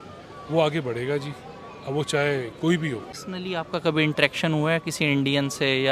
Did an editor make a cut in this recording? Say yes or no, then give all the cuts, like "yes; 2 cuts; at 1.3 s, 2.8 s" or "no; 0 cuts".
yes; 1 cut; at 3.2 s